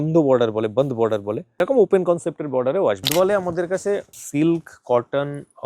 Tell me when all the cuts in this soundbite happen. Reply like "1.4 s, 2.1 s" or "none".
1.6 s, 3.1 s, 4.2 s